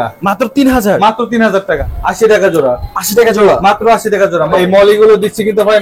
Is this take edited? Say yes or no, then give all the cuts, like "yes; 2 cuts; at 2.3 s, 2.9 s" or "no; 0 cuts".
yes; 2 cuts; at 1.8 s, 4.5 s